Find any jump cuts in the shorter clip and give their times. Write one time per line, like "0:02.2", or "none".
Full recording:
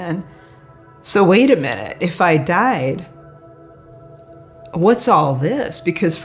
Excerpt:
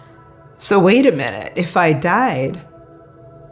0:02.6